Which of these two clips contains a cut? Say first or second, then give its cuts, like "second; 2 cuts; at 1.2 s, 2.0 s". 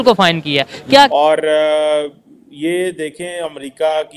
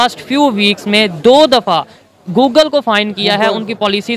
first; 1 cut; at 1.1 s